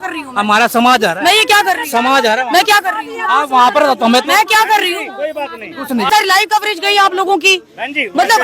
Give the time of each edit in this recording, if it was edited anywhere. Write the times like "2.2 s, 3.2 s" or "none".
6.1 s